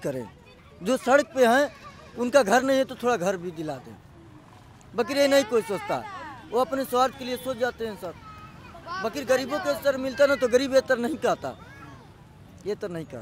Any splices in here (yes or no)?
no